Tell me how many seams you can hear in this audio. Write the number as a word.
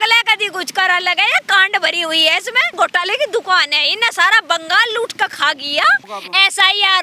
two